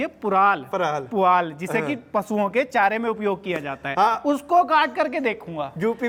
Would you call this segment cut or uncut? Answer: uncut